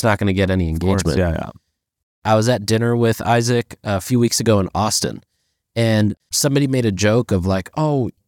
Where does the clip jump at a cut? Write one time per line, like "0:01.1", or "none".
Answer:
0:02.2

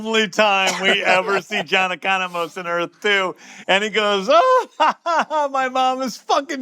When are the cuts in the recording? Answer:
0:03.5

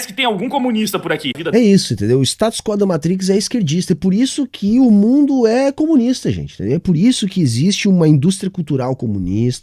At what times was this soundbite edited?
0:01.3

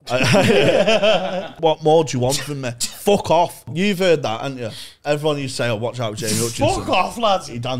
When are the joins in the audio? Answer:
0:01.5
0:03.7

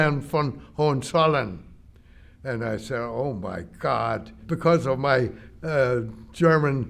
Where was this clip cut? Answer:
0:04.3

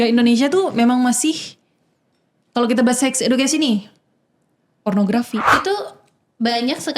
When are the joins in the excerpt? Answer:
0:05.6

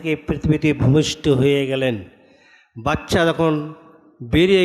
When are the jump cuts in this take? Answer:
none

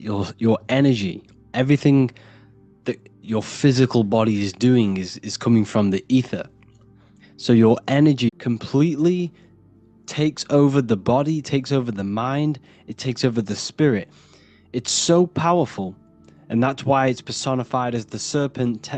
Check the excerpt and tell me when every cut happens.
0:08.3

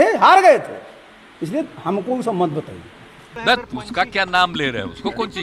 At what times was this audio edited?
0:03.2

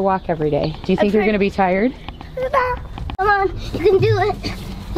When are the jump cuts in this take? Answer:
0:03.2

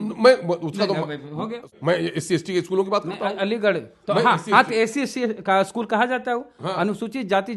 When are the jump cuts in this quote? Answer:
0:01.8

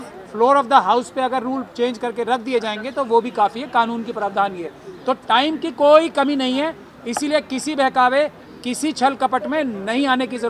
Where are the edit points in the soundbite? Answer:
none

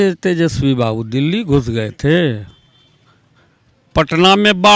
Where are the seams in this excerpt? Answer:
none

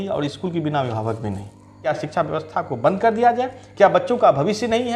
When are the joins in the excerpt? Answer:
0:01.8

